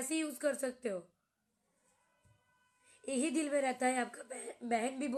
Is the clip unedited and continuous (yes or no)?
yes